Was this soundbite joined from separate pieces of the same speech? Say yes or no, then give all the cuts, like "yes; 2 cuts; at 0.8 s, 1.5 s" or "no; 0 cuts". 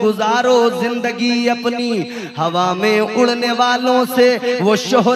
no; 0 cuts